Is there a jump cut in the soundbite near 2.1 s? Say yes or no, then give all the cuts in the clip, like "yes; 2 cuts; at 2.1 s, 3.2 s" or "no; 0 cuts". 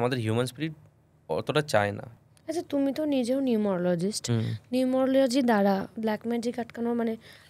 yes; 1 cut; at 2.1 s